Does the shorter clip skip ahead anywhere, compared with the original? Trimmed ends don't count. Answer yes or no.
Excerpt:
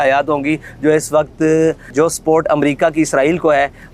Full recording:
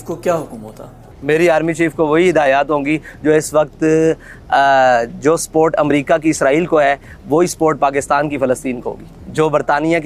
yes